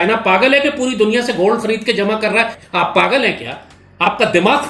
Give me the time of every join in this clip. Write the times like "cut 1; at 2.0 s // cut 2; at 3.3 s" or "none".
cut 1; at 2.6 s